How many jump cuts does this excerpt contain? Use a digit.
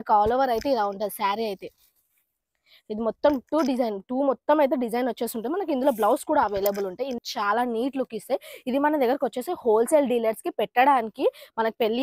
1